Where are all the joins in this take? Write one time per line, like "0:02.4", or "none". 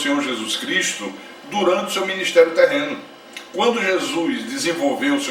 none